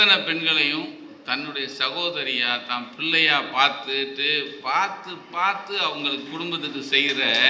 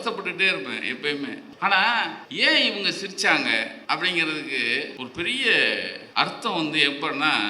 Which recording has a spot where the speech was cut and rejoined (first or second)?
second